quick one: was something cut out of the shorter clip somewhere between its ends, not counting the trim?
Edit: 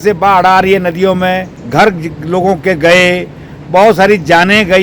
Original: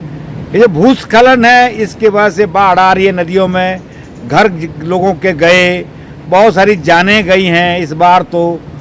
yes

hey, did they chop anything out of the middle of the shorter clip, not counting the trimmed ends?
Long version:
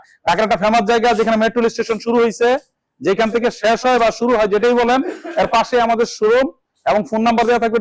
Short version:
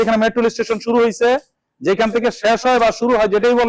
no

